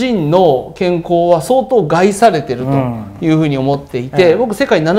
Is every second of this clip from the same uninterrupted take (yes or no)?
yes